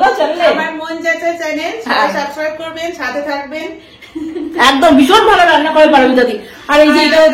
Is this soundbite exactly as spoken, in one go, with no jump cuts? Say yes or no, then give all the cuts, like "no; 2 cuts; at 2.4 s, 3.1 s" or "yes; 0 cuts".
yes; 0 cuts